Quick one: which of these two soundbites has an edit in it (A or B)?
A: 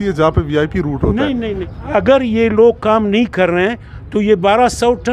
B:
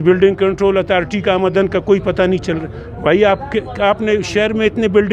A